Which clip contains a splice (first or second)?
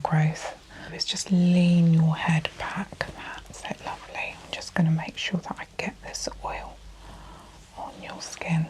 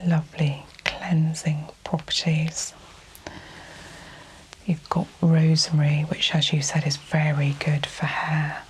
first